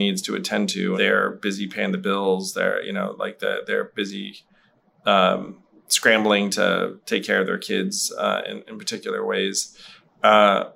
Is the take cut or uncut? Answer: cut